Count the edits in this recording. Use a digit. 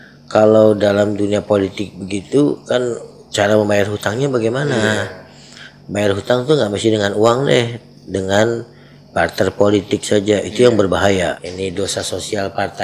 1